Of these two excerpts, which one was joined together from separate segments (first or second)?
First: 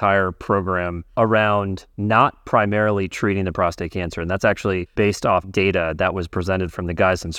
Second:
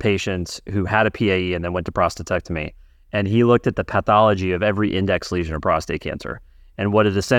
first